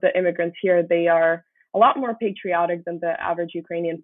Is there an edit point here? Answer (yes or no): no